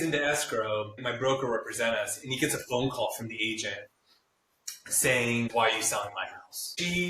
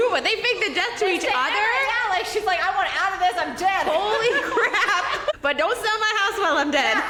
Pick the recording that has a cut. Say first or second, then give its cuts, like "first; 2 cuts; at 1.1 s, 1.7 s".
first; 2 cuts; at 1.0 s, 5.5 s